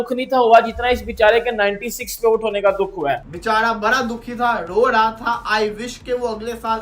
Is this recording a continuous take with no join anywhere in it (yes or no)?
no